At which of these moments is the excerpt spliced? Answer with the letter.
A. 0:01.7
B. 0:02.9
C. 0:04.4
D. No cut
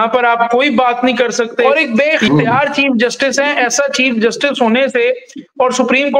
A